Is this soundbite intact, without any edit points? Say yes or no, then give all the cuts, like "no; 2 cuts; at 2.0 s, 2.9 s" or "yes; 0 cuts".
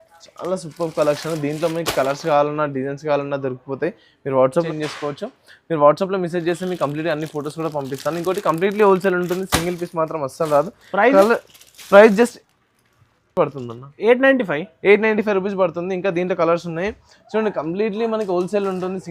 no; 1 cut; at 4.7 s